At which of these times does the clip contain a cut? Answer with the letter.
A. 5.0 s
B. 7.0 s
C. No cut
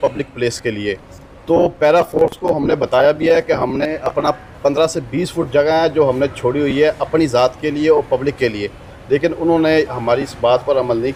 C